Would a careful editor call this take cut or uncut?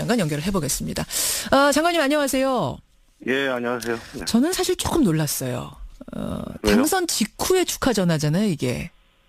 cut